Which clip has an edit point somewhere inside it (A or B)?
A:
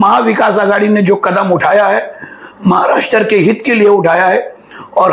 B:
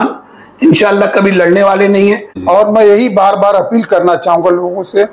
B